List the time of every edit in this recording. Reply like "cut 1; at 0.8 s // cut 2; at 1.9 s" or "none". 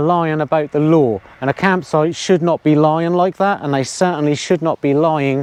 none